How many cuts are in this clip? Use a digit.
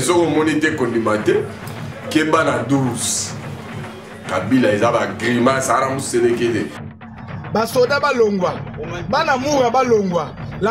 1